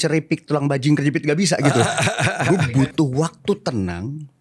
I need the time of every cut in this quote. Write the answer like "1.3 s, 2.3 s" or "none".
2.0 s